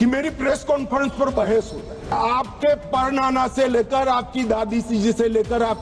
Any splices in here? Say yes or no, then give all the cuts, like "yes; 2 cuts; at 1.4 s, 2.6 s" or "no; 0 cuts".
yes; 1 cut; at 2.1 s